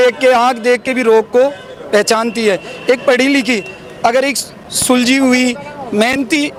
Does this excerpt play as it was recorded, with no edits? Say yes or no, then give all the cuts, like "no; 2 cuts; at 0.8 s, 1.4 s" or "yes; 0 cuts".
yes; 0 cuts